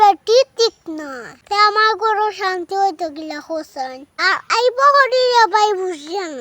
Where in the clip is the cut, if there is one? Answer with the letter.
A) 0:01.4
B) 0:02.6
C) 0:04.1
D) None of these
C